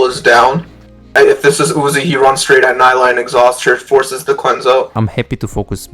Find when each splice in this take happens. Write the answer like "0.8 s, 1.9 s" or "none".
1.0 s, 4.9 s